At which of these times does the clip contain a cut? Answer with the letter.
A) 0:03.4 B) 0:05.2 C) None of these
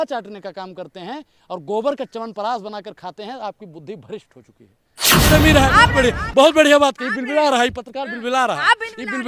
B